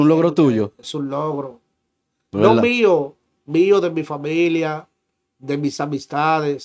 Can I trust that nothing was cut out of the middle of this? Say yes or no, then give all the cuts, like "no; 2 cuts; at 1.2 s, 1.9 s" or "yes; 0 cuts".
yes; 0 cuts